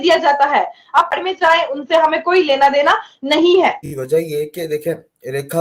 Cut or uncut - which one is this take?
cut